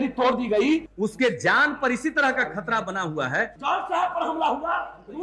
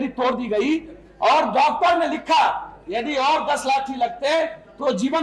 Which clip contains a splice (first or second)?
first